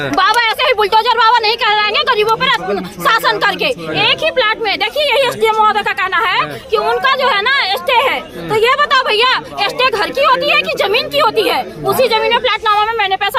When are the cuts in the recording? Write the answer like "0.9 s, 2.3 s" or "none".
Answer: none